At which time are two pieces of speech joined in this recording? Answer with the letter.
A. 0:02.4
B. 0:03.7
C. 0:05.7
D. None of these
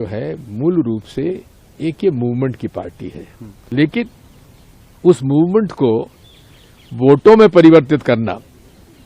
B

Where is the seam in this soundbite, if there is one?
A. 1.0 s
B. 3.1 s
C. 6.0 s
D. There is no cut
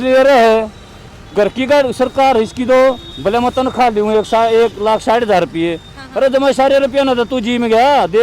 B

